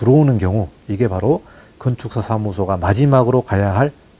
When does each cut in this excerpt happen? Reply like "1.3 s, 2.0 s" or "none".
none